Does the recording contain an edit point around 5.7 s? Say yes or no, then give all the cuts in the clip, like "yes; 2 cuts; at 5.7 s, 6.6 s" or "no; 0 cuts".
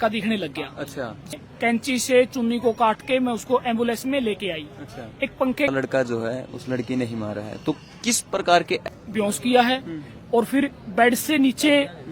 yes; 3 cuts; at 1.3 s, 5.7 s, 8.8 s